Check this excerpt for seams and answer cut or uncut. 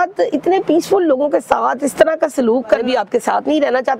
cut